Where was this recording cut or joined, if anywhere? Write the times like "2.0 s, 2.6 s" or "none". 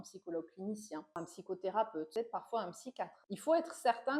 1.2 s, 2.1 s, 3.2 s